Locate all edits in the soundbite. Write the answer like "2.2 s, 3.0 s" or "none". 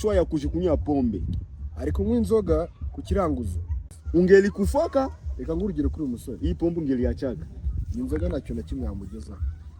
4.0 s